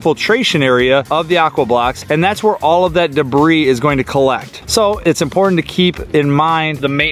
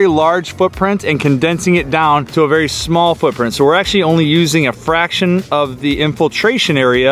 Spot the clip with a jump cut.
first; 1 cut; at 4.5 s

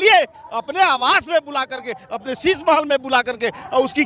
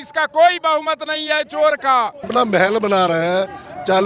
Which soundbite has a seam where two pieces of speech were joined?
second; 1 cut; at 2.3 s

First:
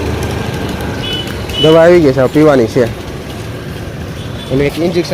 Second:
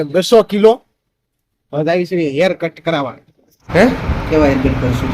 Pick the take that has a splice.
second; 1 cut; at 3.6 s

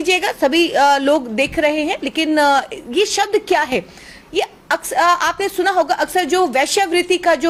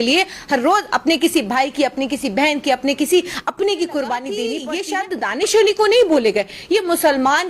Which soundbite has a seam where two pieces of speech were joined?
second; 1 cut; at 4.7 s

